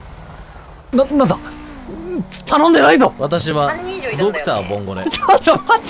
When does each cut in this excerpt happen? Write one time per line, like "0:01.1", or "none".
0:00.9
0:03.2